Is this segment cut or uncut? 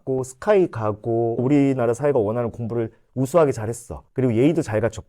cut